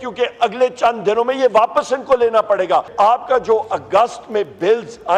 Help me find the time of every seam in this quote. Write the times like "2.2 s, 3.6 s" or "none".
2.9 s